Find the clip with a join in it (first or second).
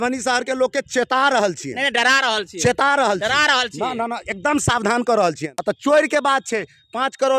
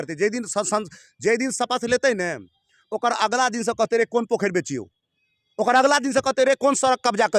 first